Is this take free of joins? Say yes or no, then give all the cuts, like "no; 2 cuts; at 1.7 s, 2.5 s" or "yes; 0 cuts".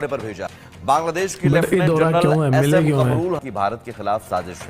no; 1 cut; at 3.4 s